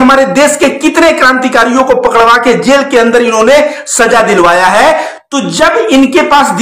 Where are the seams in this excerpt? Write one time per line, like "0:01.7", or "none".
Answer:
none